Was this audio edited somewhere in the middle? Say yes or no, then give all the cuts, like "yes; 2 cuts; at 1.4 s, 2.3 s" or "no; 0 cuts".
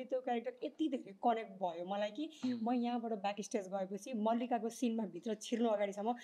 no; 0 cuts